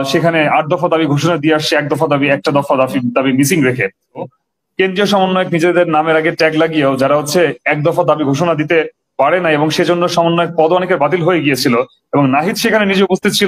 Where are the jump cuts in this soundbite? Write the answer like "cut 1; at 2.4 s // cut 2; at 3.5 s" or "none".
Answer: cut 1; at 4.2 s